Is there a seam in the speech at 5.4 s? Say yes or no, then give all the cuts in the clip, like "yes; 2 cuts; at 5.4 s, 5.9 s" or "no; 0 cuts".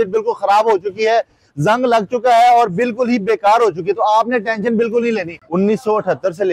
yes; 1 cut; at 5.4 s